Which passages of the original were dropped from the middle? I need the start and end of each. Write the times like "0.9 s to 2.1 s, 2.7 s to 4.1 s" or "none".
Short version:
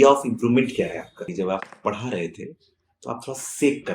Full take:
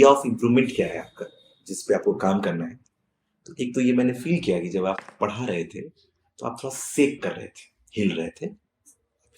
1.3 s to 4.7 s